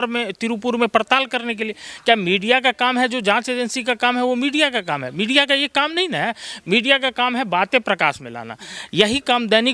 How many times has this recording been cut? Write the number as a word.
zero